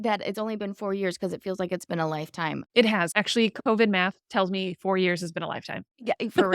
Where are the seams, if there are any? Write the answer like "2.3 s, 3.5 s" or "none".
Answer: 3.1 s